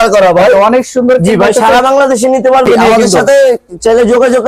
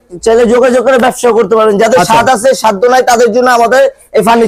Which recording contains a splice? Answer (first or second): first